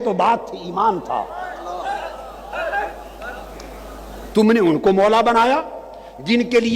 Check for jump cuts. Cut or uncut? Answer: uncut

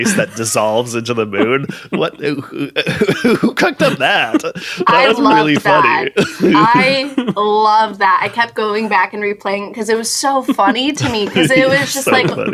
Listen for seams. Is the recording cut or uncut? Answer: uncut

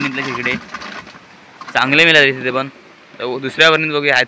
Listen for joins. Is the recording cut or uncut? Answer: uncut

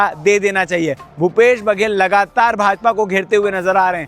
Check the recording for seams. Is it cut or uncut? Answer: uncut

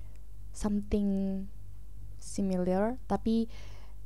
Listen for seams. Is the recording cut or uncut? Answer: uncut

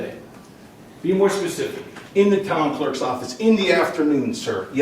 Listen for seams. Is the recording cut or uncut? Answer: cut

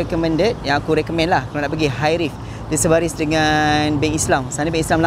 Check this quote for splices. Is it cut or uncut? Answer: uncut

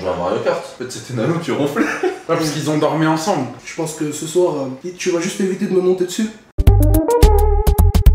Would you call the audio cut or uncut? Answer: cut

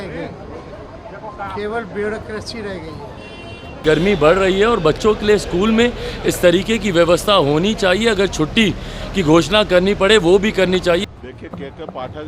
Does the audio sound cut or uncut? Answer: cut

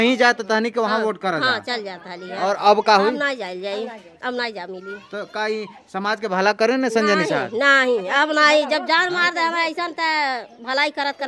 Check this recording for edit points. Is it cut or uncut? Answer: uncut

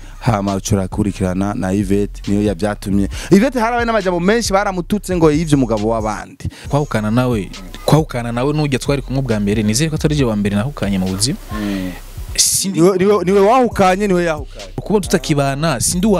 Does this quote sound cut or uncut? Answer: cut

